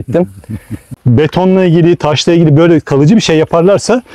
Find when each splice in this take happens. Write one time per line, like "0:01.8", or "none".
0:00.9

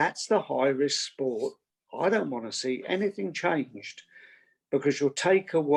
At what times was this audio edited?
none

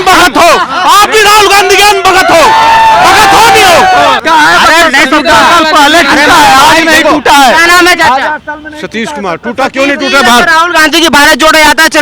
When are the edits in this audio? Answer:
0:04.2

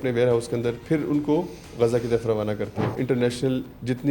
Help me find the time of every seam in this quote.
0:03.0

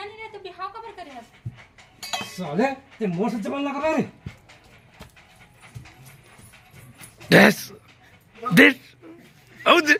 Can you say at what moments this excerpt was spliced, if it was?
none

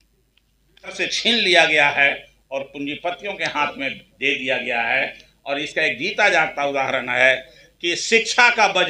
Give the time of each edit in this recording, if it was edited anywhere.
0:01.0

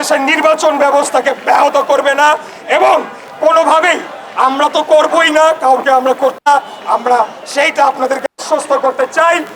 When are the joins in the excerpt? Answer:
none

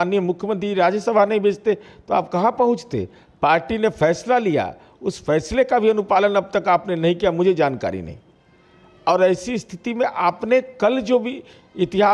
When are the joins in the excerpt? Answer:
none

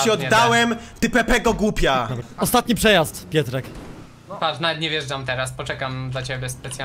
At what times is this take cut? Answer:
0:02.2

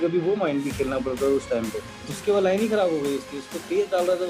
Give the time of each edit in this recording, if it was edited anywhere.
0:02.1

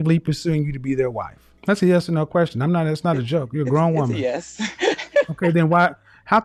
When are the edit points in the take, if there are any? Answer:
none

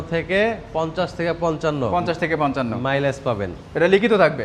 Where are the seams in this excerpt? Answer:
none

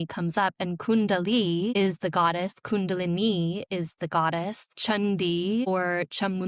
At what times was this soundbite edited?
0:01.7
0:04.7
0:05.7

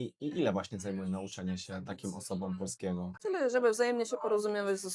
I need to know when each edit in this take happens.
0:03.2

